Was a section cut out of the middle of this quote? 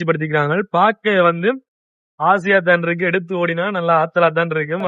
no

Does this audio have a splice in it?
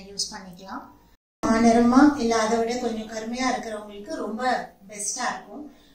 yes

